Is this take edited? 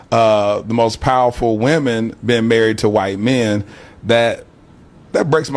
no; 0 cuts

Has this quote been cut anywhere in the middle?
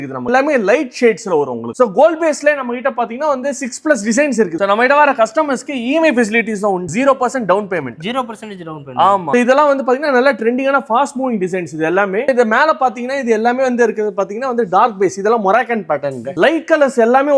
yes; 5 cuts; at 1.7 s, 4.6 s, 9.3 s, 12.3 s, 16.3 s

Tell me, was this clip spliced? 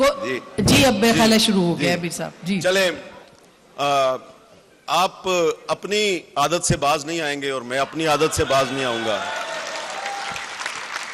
no; 0 cuts

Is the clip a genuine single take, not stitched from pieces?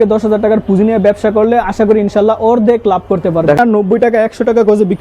no; 1 cut; at 3.6 s

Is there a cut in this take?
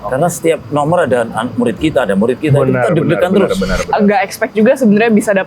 yes; 1 cut; at 3.8 s

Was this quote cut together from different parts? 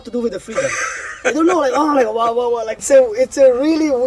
yes; 1 cut; at 2.8 s

